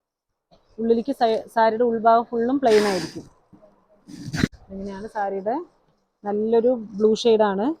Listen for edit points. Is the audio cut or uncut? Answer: cut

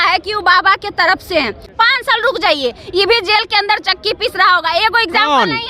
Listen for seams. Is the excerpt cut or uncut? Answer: cut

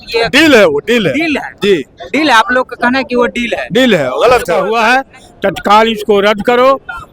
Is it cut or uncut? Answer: cut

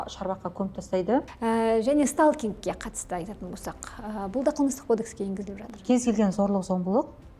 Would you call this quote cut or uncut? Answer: cut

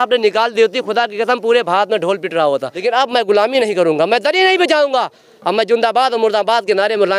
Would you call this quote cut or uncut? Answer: cut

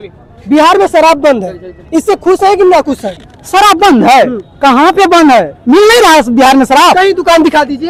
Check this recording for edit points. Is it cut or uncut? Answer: uncut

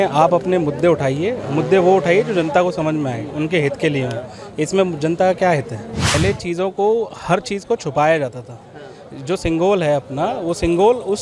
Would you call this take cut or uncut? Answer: cut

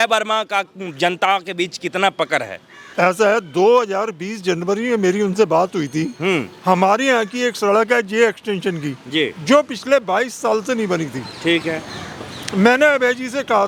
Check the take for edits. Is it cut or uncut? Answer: uncut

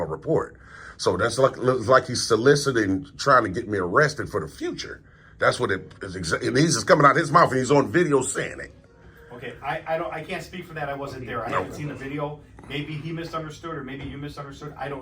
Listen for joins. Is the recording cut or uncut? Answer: uncut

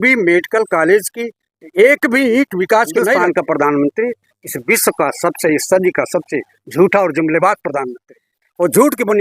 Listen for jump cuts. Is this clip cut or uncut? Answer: cut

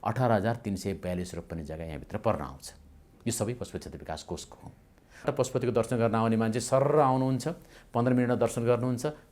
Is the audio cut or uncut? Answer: cut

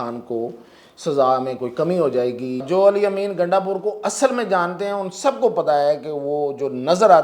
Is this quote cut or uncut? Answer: cut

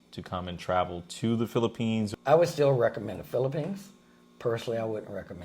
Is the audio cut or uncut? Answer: cut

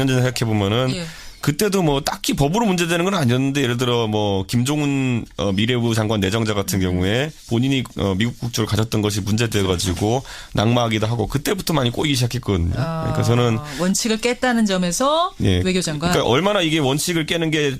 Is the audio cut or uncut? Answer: uncut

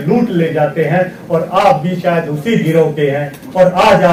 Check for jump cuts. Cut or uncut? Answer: uncut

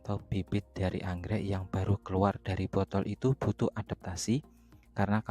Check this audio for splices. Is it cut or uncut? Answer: uncut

